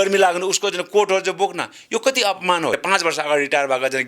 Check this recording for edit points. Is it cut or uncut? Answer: cut